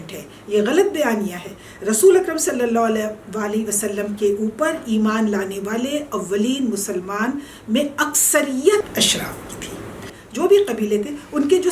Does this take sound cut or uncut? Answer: cut